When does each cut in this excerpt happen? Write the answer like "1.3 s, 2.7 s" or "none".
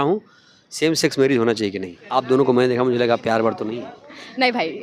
1.9 s